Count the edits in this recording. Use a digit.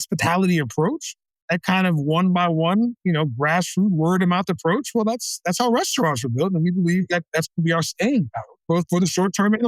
1